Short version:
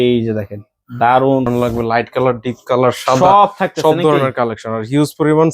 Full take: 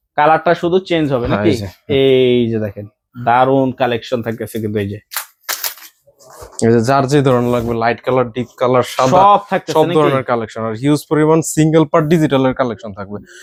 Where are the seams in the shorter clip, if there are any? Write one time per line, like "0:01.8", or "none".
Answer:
0:01.5